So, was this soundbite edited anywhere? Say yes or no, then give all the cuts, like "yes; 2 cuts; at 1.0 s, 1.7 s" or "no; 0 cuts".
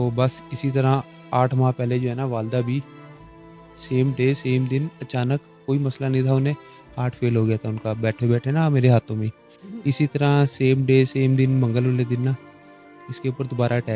no; 0 cuts